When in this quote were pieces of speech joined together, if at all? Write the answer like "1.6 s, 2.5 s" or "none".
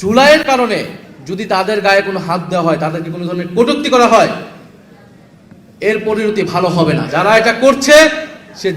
7.1 s